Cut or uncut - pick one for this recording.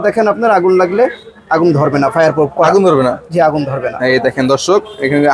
uncut